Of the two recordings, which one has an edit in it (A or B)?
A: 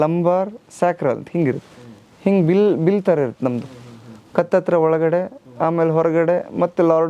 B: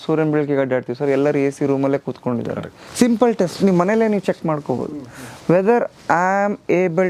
B